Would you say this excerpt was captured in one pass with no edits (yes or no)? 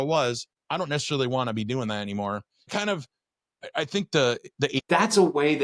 no